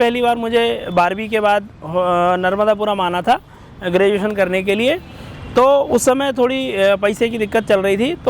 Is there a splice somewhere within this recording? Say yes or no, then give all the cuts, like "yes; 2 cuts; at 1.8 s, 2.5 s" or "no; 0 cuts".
no; 0 cuts